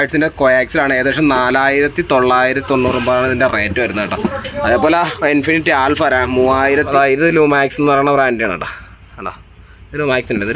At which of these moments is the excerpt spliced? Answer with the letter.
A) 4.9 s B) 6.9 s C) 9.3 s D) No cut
B